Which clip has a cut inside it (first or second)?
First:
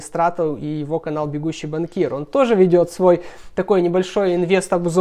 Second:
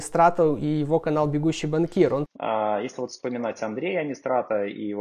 second